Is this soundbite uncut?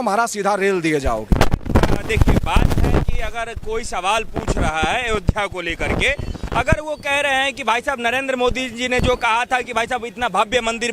yes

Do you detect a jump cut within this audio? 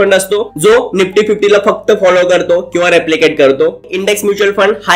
yes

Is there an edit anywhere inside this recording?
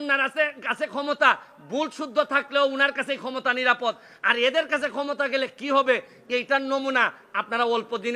no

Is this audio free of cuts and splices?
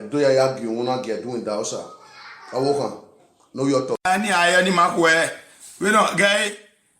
no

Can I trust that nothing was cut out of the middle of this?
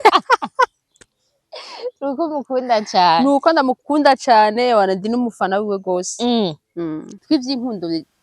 no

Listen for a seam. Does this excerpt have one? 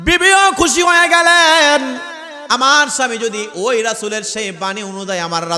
no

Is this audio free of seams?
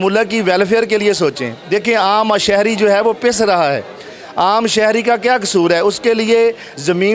yes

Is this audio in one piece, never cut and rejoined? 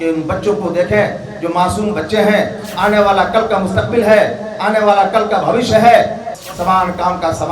no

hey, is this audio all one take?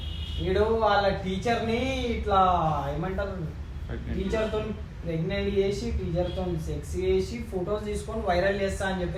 yes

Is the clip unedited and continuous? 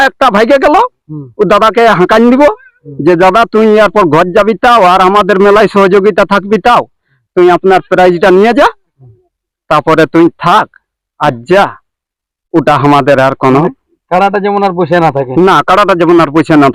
yes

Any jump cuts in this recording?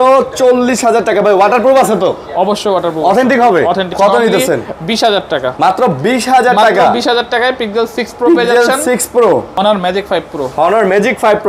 yes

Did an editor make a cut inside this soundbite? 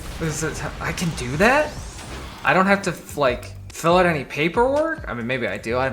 no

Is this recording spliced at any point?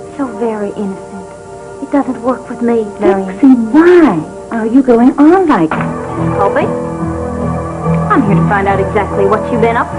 no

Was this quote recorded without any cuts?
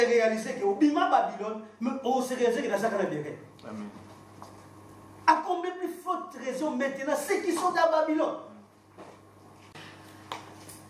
no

